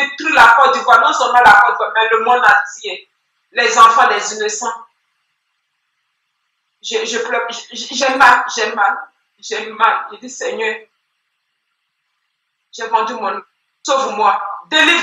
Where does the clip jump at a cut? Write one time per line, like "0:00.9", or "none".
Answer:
none